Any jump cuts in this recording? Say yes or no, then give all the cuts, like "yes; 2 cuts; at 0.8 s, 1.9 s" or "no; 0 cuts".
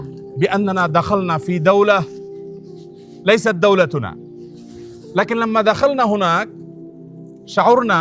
no; 0 cuts